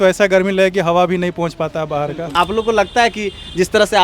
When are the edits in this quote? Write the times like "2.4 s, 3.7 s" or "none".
2.3 s